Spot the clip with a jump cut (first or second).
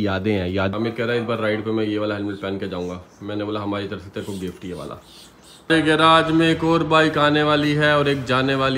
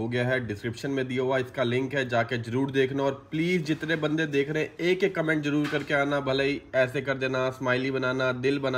first